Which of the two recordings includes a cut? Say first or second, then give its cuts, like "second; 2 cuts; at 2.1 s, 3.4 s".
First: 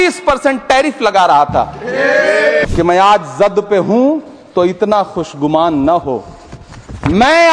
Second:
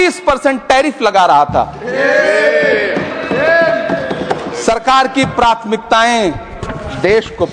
first; 1 cut; at 2.6 s